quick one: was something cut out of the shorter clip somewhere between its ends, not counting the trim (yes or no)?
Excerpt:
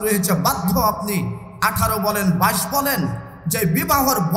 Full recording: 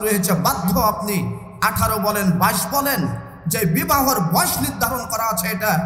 no